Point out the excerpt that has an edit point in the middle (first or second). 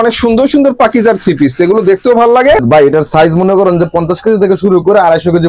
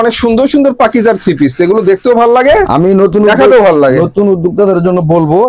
first